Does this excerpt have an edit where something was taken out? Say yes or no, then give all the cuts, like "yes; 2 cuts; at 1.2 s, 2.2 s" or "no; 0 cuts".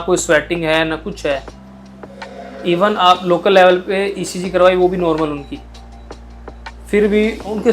no; 0 cuts